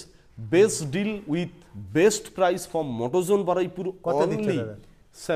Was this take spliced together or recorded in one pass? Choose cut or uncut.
uncut